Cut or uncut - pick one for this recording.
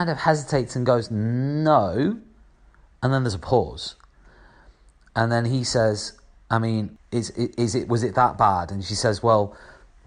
cut